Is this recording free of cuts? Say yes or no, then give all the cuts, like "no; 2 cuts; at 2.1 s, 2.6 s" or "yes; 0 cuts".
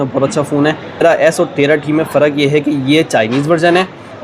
no; 1 cut; at 1.0 s